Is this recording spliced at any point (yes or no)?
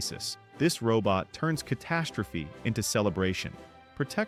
no